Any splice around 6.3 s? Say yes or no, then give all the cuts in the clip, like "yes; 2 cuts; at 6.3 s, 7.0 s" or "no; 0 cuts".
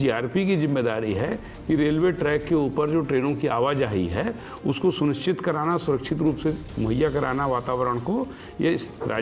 no; 0 cuts